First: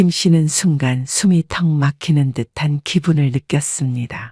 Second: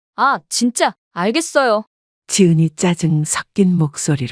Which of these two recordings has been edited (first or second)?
second